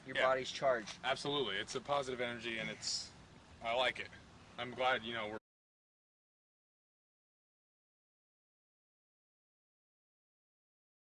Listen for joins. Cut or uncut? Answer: uncut